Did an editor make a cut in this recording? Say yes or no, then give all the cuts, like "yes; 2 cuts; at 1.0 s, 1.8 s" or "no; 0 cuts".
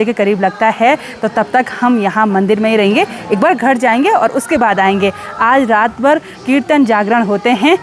no; 0 cuts